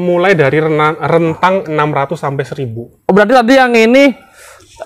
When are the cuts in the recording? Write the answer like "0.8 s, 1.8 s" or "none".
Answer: none